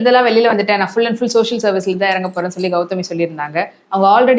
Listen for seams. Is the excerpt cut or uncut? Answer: uncut